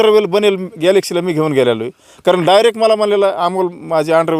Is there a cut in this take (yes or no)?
no